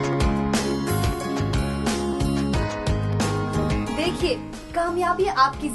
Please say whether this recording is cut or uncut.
cut